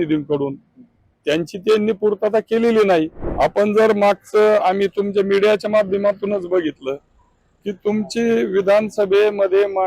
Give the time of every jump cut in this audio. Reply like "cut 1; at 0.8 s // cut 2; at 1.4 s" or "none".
cut 1; at 3.2 s